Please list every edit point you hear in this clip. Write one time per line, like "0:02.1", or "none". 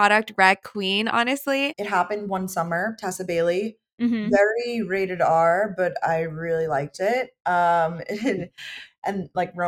0:01.8